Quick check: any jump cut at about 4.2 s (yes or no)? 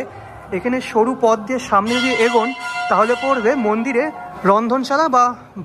yes